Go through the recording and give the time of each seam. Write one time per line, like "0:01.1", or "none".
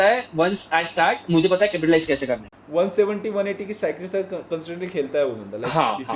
0:02.5